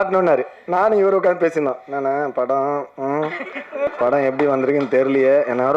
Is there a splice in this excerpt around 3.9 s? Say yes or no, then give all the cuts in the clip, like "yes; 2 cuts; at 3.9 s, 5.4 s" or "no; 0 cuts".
yes; 1 cut; at 3.9 s